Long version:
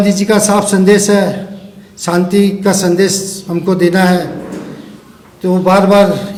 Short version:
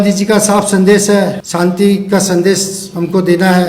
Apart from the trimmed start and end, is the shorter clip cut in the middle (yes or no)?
yes